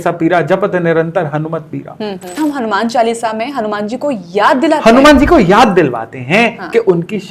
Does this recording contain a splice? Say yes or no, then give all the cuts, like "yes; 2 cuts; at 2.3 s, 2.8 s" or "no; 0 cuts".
yes; 1 cut; at 2.4 s